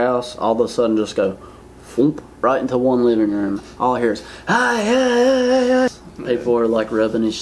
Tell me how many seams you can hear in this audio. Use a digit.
1